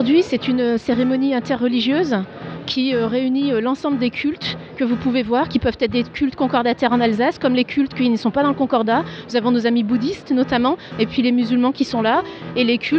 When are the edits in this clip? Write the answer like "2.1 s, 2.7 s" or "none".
6.1 s